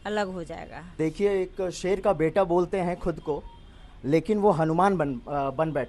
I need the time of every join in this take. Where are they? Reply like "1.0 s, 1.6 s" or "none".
1.0 s